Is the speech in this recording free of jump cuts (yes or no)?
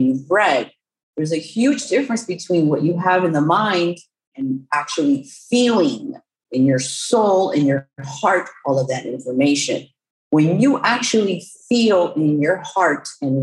no